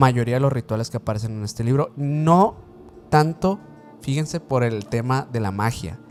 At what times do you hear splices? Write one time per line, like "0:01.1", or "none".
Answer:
none